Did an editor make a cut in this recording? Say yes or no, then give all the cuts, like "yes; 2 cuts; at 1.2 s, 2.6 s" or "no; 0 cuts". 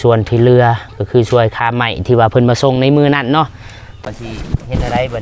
yes; 1 cut; at 3.9 s